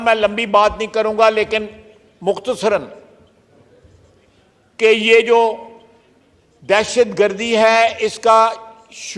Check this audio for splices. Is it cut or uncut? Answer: uncut